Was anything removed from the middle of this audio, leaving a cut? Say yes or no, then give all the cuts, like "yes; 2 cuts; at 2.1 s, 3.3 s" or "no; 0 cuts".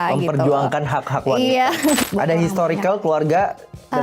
yes; 1 cut; at 2.0 s